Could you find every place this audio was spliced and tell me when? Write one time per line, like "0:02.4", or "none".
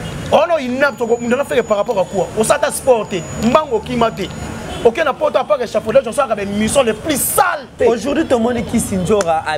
0:07.7